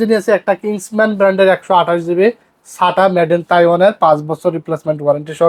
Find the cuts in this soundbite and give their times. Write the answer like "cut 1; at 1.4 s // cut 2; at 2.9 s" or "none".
none